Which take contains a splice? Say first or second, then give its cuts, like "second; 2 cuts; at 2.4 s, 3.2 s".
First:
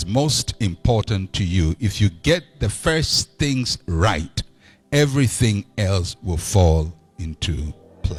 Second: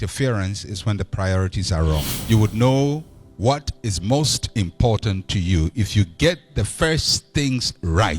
second; 1 cut; at 2.1 s